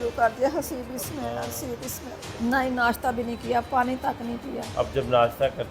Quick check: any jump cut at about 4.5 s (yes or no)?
no